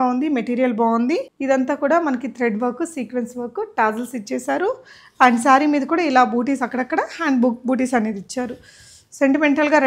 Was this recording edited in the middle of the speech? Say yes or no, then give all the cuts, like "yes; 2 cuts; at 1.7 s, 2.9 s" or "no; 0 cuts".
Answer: yes; 1 cut; at 1.3 s